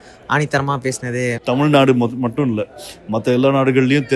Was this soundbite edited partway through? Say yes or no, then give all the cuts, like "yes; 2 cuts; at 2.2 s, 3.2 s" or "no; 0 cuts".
yes; 1 cut; at 1.4 s